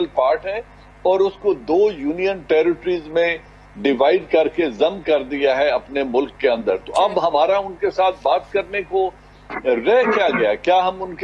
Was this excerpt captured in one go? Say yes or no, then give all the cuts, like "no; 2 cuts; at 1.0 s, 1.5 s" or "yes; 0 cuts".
yes; 0 cuts